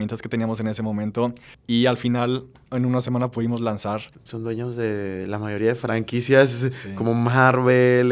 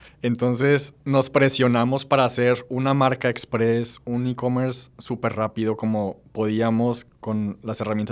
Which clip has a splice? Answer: first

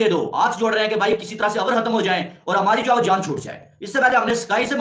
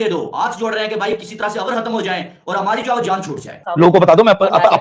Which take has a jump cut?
second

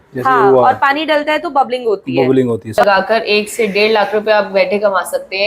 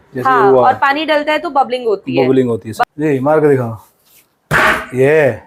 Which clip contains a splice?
first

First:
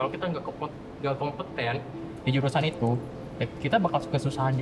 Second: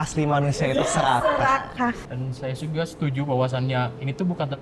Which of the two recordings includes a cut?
second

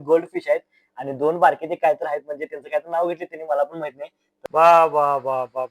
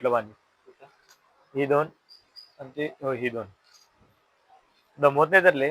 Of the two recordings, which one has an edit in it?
first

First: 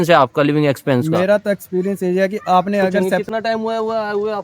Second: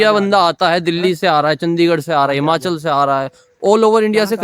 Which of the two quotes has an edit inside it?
first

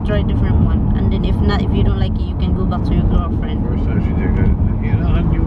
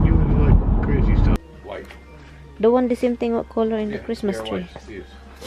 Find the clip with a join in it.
second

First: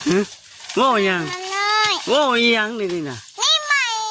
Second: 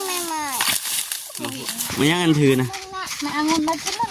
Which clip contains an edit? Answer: second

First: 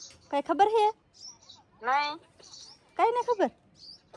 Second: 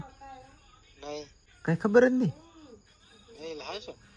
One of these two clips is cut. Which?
second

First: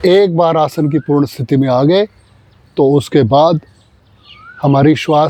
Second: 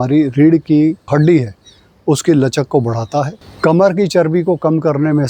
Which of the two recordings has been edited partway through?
second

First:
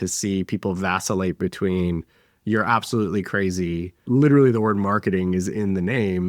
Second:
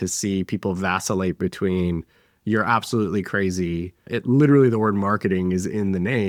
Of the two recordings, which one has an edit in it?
first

